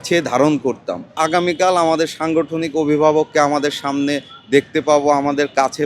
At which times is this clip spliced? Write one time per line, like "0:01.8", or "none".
0:01.2